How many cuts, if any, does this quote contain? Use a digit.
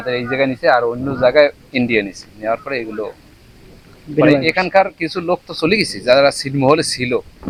0